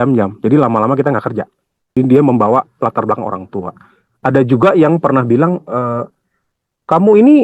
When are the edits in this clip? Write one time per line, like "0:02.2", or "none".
0:01.8